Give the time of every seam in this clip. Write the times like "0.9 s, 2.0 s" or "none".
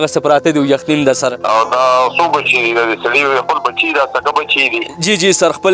1.4 s

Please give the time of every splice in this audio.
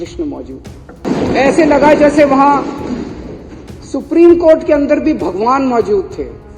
1.0 s

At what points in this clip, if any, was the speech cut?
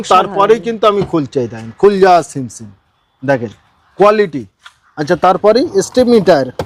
none

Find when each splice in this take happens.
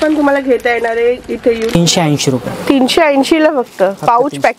1.7 s

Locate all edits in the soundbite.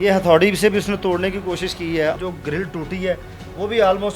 2.2 s

